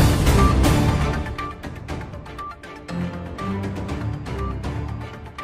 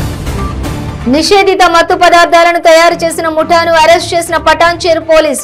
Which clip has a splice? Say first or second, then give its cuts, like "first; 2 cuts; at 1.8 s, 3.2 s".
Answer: second; 1 cut; at 1.0 s